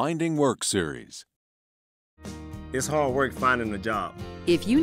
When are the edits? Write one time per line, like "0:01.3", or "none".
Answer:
none